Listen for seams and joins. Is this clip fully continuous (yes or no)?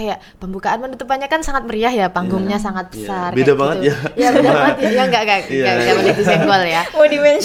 yes